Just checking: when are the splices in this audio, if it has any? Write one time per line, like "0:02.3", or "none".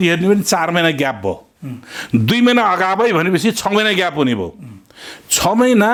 none